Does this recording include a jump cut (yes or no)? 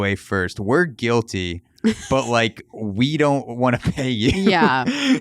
no